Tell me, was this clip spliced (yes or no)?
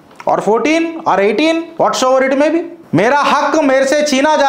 yes